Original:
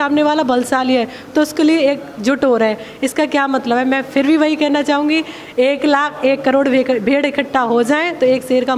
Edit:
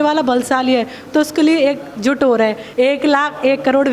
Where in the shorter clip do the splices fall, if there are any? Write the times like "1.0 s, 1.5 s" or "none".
2.6 s